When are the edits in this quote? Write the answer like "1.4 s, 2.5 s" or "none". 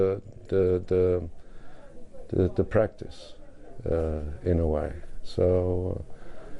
1.9 s

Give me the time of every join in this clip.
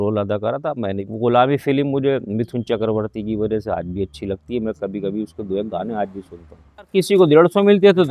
1.1 s, 6.9 s

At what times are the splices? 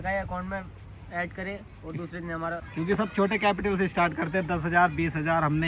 2.7 s

